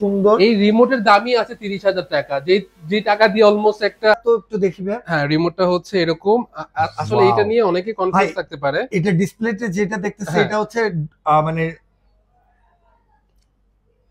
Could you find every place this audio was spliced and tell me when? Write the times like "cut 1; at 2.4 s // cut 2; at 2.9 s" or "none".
cut 1; at 4.2 s